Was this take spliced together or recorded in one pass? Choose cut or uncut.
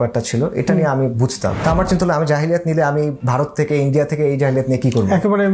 cut